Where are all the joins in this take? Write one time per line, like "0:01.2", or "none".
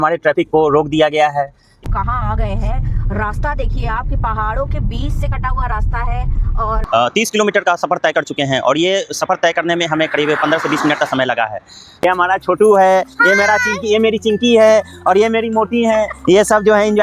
0:01.6
0:06.8
0:11.9